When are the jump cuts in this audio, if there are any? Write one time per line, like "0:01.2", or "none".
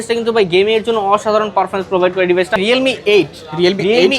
0:02.6